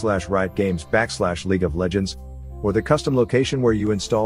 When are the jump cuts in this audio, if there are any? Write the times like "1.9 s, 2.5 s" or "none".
none